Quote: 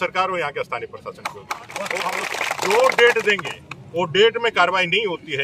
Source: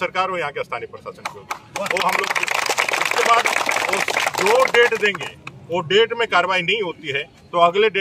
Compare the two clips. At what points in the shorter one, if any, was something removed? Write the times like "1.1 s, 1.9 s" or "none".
2.3 s